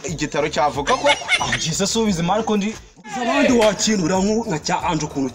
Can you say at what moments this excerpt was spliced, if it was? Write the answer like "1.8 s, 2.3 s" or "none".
3.2 s